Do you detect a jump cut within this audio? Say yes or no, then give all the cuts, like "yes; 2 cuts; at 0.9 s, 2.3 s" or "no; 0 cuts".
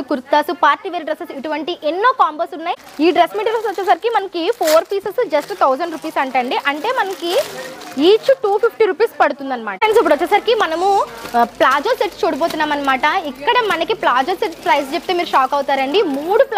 yes; 2 cuts; at 2.8 s, 9.8 s